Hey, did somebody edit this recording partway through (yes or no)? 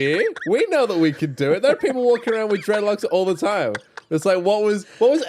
no